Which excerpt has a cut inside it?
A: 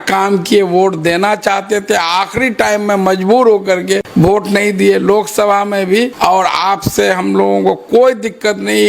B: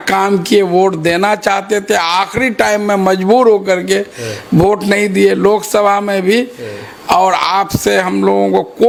A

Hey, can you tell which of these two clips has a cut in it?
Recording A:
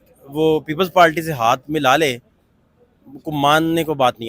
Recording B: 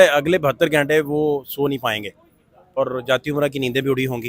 B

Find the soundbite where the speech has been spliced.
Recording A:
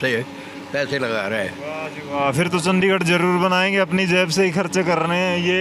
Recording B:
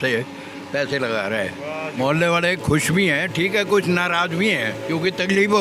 B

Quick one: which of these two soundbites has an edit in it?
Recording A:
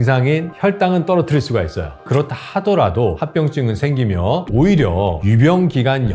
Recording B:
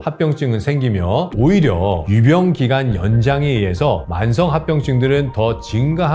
A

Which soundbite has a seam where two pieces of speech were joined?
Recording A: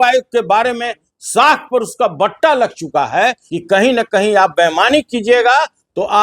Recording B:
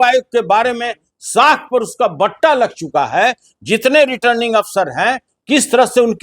A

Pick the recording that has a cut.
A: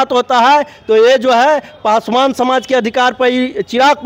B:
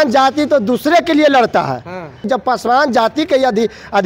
B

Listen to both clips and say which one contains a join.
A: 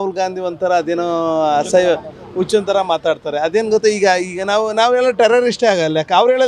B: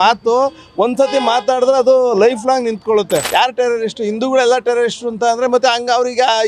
B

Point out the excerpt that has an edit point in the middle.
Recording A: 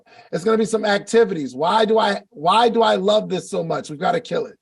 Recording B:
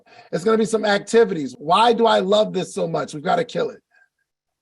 B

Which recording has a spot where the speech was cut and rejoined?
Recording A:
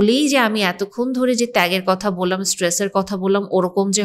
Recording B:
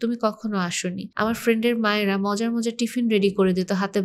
B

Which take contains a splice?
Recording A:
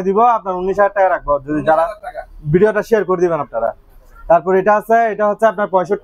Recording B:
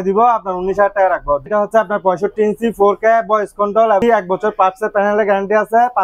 B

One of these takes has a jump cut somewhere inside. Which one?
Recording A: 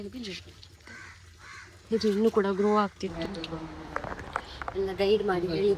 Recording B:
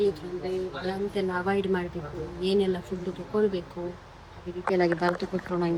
A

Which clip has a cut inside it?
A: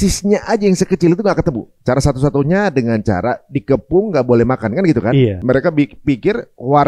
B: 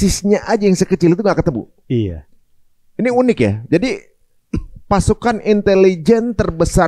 A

